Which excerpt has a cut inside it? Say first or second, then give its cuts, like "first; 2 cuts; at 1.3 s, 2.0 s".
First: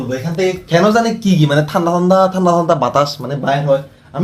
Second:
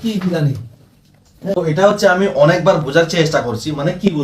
second; 1 cut; at 1.4 s